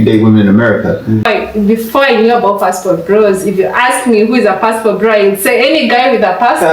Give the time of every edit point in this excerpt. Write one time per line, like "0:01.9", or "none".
0:01.2